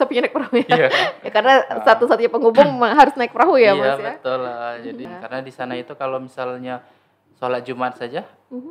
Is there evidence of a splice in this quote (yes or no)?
yes